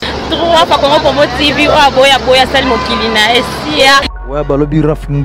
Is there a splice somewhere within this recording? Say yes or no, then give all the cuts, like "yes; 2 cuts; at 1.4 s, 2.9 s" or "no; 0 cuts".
yes; 1 cut; at 4.1 s